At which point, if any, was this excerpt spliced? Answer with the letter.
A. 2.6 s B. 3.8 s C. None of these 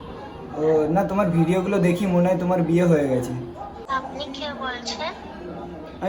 B